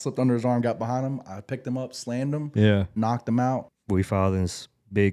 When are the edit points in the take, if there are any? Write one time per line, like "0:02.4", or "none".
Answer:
0:03.7